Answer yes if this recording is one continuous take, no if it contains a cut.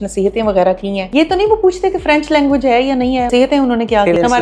no